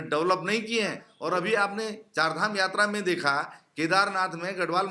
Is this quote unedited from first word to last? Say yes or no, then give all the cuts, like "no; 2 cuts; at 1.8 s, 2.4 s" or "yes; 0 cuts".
no; 1 cut; at 1.1 s